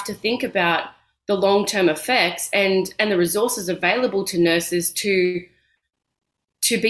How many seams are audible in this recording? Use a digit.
0